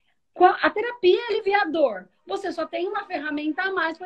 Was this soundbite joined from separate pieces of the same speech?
no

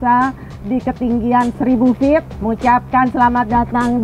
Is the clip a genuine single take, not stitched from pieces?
no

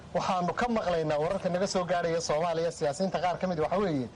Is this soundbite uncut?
yes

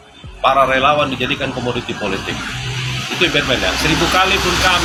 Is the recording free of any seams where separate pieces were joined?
yes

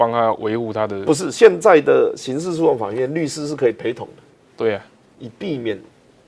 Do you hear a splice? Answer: no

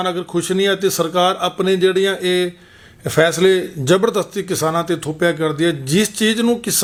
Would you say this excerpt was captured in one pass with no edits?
yes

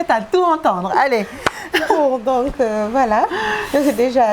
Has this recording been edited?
no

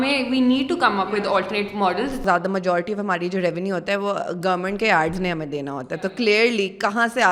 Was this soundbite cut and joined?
yes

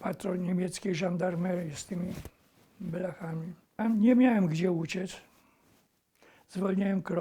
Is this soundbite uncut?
no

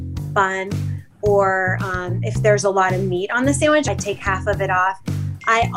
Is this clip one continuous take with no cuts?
no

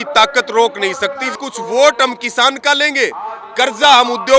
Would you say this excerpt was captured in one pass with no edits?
no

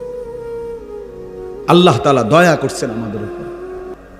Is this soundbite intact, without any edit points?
no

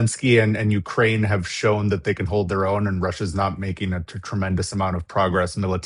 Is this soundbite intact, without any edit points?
yes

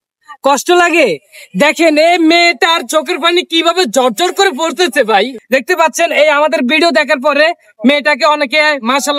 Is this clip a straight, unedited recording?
no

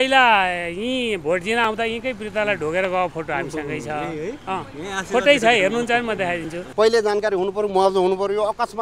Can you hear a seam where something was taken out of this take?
yes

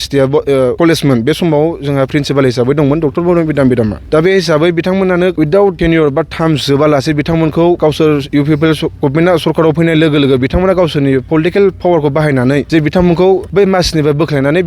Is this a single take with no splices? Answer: no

